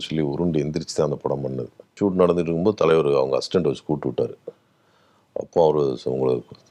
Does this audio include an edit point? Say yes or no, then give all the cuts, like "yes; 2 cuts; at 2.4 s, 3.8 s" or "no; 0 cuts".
yes; 1 cut; at 2.0 s